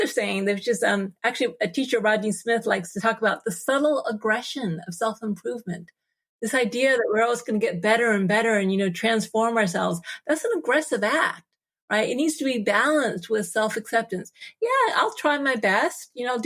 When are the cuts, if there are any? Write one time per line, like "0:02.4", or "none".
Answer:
0:03.0